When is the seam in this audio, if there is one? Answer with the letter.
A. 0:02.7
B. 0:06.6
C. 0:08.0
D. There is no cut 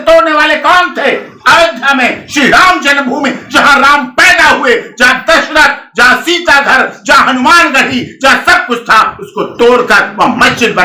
D